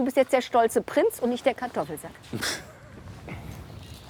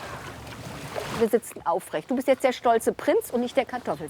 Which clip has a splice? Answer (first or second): second